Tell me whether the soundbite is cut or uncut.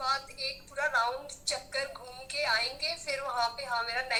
uncut